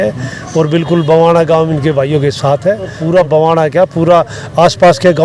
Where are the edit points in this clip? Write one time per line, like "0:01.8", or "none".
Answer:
0:03.0